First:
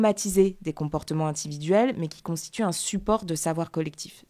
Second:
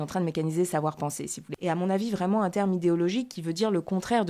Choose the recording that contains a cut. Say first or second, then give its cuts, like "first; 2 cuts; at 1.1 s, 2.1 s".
second; 1 cut; at 1.4 s